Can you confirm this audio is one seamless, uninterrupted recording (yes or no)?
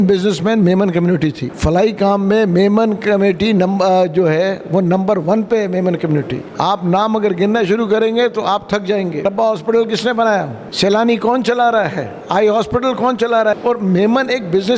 no